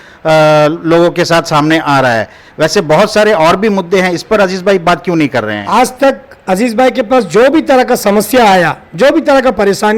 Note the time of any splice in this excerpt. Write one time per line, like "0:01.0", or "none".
none